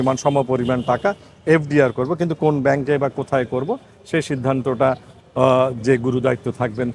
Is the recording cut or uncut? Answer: uncut